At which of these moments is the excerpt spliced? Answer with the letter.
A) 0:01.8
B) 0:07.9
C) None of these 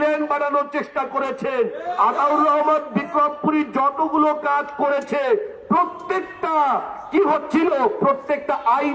C